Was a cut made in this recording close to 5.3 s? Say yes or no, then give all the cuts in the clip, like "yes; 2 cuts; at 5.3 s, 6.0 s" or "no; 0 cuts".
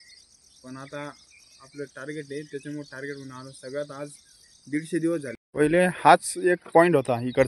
yes; 1 cut; at 5.3 s